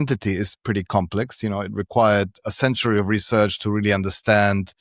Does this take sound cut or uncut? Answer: uncut